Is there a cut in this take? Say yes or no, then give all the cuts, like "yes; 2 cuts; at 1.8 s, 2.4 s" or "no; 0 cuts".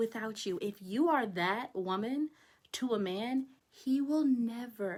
no; 0 cuts